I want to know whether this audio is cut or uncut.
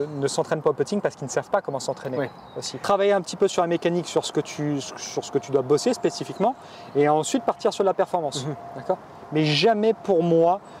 uncut